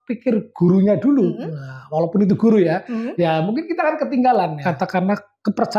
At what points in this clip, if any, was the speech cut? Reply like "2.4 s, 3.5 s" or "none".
4.6 s